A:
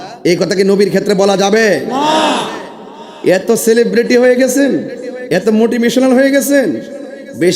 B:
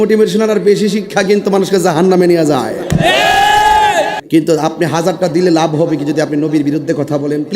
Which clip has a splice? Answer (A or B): B